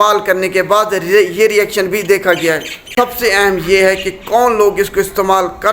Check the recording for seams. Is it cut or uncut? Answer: cut